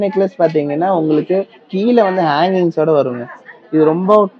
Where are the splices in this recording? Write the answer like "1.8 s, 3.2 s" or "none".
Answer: none